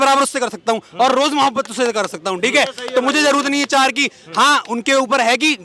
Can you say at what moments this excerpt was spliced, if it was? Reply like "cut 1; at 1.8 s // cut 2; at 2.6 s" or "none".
none